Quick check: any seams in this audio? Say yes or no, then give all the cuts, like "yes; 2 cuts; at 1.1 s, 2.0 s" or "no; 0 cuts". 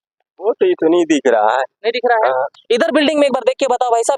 no; 0 cuts